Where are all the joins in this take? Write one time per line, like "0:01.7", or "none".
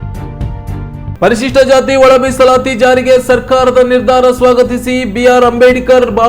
0:01.1